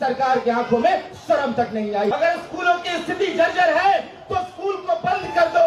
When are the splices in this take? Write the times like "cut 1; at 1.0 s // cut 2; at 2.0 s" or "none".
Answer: cut 1; at 2.1 s

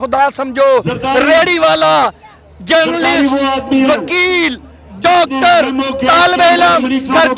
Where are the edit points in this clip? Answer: none

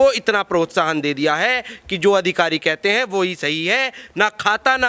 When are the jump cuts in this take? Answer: none

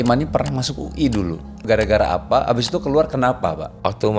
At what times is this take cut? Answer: cut 1; at 1.6 s

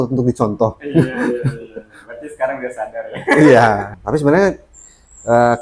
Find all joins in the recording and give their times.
cut 1; at 3.9 s

